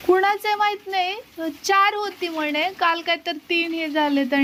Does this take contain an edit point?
no; 0 cuts

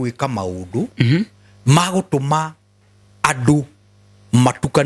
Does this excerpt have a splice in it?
no; 0 cuts

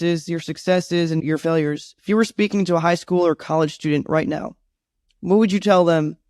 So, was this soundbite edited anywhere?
yes; 1 cut; at 1.2 s

